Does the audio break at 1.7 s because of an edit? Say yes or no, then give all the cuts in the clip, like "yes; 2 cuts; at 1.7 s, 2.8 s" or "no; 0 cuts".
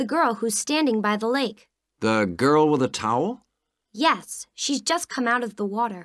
no; 0 cuts